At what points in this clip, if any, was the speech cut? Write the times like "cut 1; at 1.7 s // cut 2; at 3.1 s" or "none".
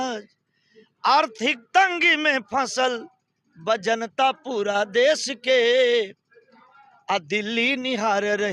none